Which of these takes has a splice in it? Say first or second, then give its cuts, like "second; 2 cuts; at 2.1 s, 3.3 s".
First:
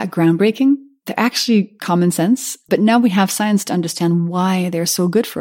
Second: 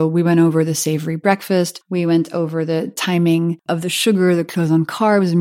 second; 2 cuts; at 1.8 s, 3.6 s